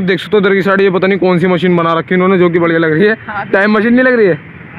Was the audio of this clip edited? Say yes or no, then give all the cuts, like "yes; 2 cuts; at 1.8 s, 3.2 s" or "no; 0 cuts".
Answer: no; 0 cuts